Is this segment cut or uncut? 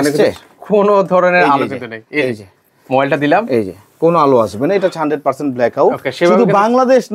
cut